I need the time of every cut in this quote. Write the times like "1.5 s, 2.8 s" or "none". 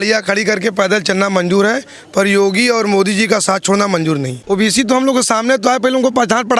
4.4 s